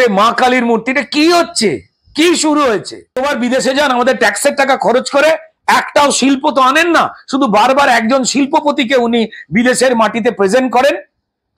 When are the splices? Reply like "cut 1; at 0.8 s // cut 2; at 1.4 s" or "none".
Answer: cut 1; at 3.2 s